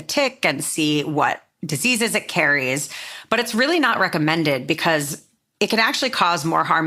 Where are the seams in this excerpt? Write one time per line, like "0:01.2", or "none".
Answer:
none

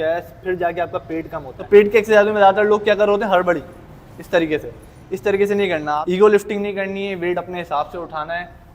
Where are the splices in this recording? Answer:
0:01.5
0:05.9

